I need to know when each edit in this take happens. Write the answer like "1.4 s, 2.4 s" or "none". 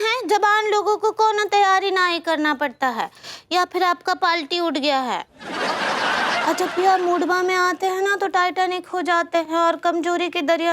6.4 s